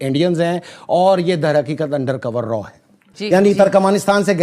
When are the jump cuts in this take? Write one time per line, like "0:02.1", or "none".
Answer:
0:03.1